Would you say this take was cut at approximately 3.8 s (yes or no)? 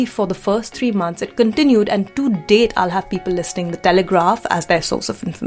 no